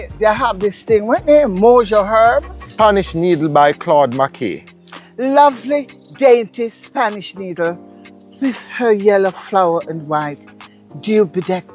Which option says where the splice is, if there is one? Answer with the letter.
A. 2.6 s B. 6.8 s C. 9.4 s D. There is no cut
A